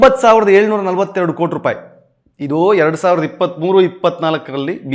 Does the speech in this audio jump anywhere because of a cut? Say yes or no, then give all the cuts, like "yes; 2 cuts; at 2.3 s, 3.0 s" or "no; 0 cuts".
no; 0 cuts